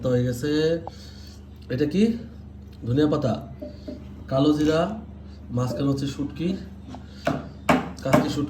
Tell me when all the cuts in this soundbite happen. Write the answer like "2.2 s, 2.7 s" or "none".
none